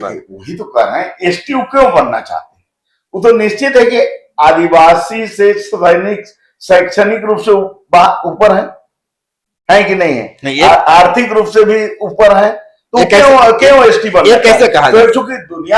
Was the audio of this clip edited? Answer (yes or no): no